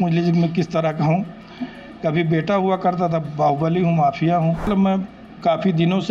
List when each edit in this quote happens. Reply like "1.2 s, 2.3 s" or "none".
4.7 s